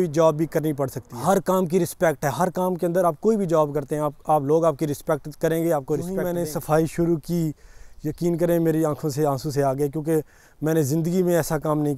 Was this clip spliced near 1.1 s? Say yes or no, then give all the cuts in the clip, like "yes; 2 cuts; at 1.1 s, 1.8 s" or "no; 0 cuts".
yes; 2 cuts; at 1.1 s, 6.2 s